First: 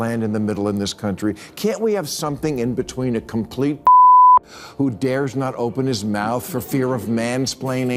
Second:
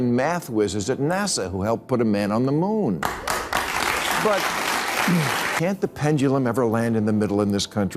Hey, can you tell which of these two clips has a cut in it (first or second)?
second